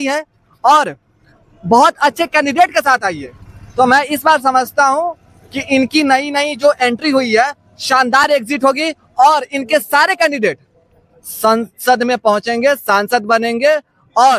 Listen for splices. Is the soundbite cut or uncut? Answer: uncut